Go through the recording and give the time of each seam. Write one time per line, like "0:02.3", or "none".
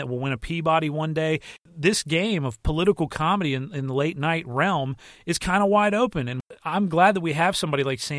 0:01.5
0:06.5